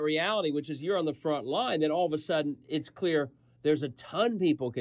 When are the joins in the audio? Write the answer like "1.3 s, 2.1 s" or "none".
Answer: none